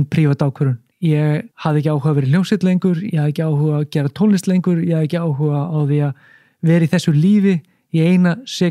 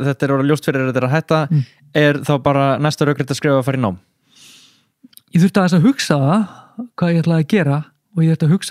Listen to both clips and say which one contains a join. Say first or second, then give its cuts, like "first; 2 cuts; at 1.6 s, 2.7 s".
first; 2 cuts; at 0.9 s, 1.5 s